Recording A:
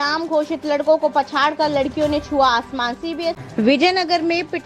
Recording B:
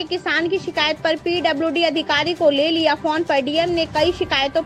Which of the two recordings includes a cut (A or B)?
A